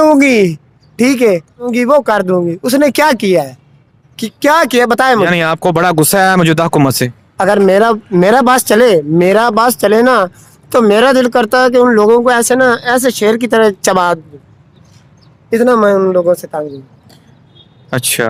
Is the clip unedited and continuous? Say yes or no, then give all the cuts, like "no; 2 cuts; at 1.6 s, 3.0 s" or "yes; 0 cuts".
yes; 0 cuts